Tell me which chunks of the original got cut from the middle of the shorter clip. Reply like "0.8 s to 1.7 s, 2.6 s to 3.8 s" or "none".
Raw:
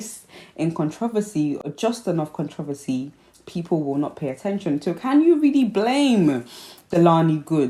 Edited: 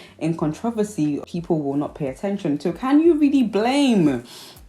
1.6 s to 3.5 s